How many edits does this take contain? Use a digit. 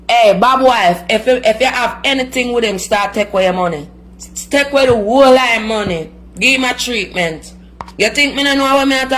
0